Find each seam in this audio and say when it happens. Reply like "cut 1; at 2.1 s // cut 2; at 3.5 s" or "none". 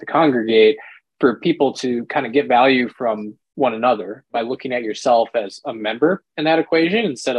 cut 1; at 4.2 s

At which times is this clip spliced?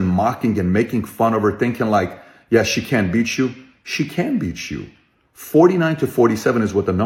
none

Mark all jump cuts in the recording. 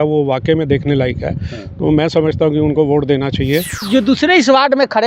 cut 1; at 3.9 s

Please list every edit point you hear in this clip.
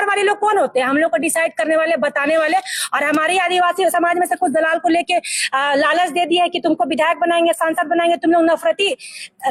none

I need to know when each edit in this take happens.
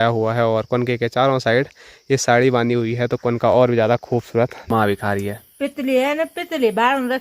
cut 1; at 4.6 s

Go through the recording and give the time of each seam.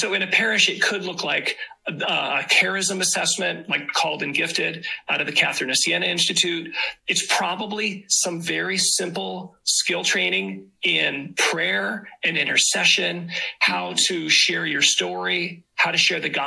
none

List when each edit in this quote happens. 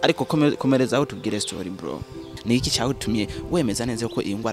cut 1; at 2.2 s

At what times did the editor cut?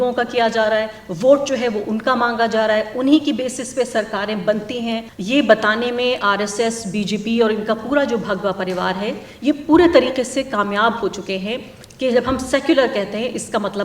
cut 1; at 5.1 s

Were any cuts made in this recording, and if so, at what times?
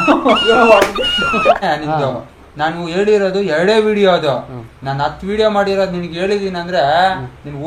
cut 1; at 1.6 s

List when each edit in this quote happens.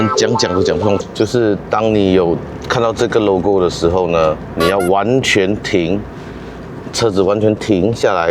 cut 1; at 1.0 s

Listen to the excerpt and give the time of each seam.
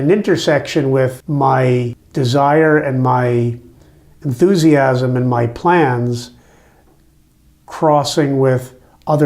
cut 1; at 1.2 s // cut 2; at 2.0 s

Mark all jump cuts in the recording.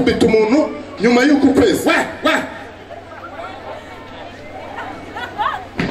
none

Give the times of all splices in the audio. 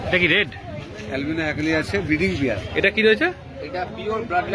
cut 1; at 2.6 s

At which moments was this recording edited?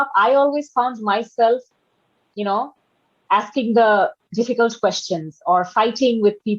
none

